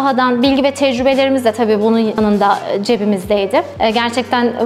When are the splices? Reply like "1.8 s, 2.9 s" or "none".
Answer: 2.2 s, 3.7 s